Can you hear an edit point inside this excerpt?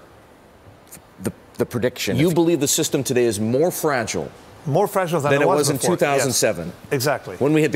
yes; 1 cut; at 2.1 s

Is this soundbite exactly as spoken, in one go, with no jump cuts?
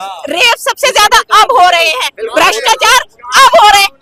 yes; 0 cuts

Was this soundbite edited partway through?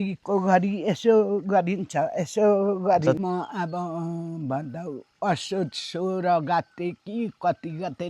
yes; 1 cut; at 3.2 s

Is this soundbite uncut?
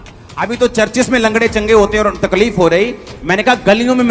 yes; 0 cuts

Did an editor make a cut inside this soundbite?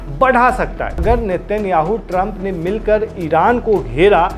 yes; 1 cut; at 1.0 s

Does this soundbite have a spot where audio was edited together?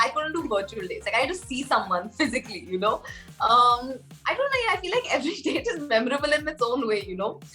no; 0 cuts

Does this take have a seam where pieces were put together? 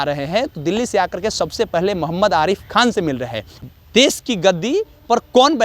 yes; 1 cut; at 3.5 s

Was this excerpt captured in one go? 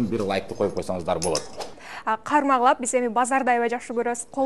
no; 1 cut; at 1.9 s

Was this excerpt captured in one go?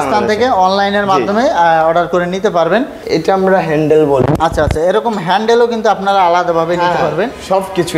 no; 1 cut; at 3.0 s

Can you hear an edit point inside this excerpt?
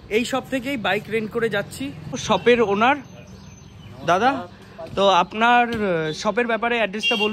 no; 0 cuts

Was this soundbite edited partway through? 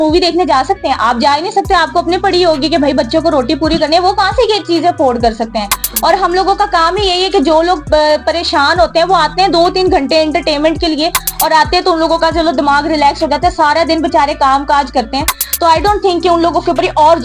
no; 0 cuts

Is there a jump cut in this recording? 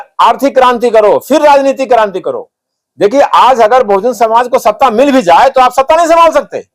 no; 0 cuts

